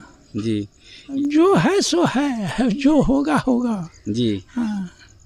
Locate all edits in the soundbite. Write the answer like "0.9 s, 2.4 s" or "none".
1.1 s

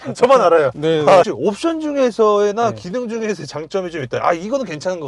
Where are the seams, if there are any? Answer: 1.3 s

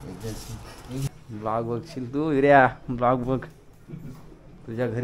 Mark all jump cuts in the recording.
1.1 s

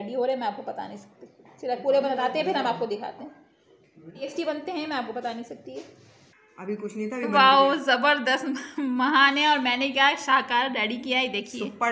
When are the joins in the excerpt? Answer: 4.2 s

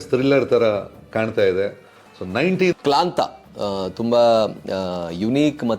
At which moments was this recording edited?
2.8 s

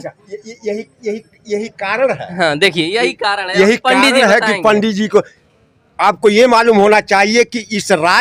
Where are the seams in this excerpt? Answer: none

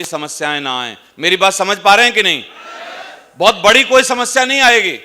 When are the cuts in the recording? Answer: none

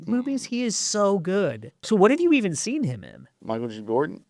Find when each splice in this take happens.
1.8 s, 3.4 s

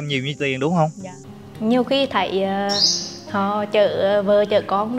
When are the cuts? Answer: 1.1 s

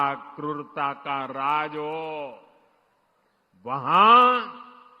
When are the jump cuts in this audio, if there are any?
none

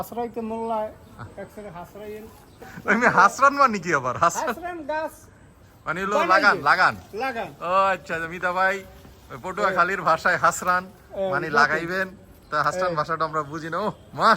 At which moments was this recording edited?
2.7 s

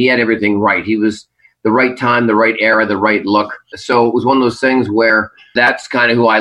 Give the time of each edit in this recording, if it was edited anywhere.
3.7 s, 5.5 s

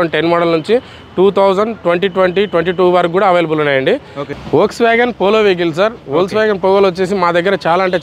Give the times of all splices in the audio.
4.2 s

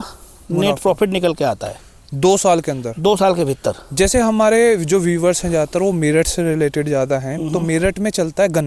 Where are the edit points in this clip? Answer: none

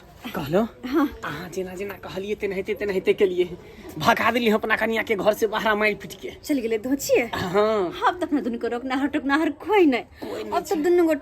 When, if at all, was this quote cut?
none

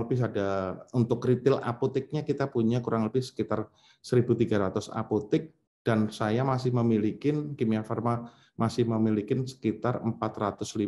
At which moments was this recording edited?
none

